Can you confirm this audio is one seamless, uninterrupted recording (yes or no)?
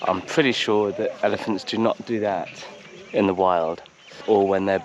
yes